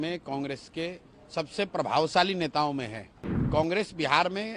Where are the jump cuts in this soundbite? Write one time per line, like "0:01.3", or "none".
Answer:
0:03.4